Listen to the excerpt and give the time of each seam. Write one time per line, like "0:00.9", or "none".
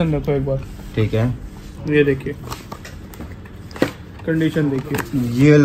none